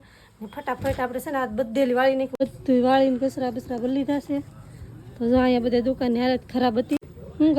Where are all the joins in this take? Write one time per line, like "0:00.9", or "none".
none